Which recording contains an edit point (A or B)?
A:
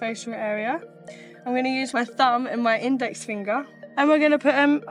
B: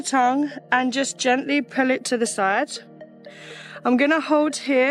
A